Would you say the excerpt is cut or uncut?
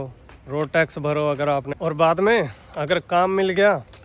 cut